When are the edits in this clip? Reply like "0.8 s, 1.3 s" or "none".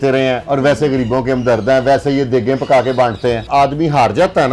3.5 s

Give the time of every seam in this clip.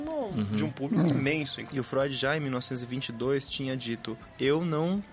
1.6 s, 4.2 s

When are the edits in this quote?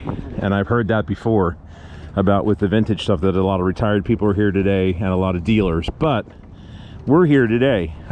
none

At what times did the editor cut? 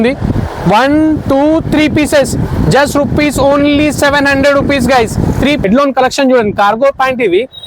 5.6 s

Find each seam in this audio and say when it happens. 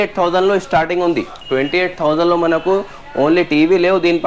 1.3 s

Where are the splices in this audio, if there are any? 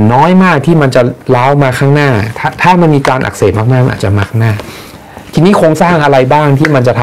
none

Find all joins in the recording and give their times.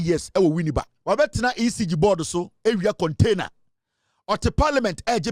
0.9 s

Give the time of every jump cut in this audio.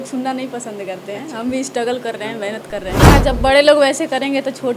3.1 s

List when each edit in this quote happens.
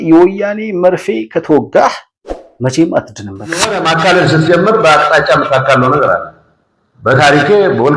3.6 s

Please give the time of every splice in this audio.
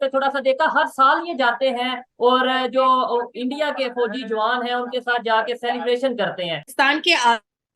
6.6 s

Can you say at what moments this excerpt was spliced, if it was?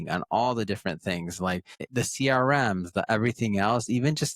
1.8 s

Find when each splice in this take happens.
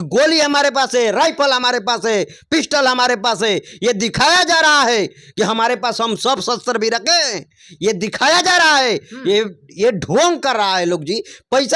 none

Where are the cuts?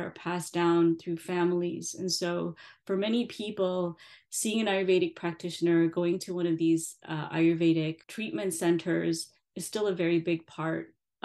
8.1 s

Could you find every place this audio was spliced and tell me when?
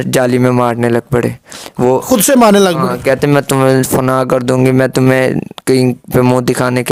none

